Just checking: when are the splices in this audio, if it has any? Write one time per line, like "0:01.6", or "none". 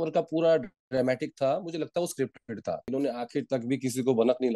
0:02.9